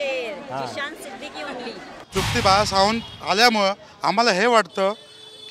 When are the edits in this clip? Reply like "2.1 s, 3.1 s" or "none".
2.0 s